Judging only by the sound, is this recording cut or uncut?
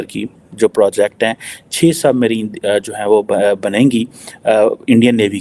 uncut